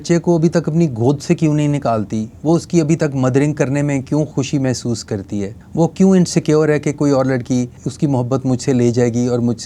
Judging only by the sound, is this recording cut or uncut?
cut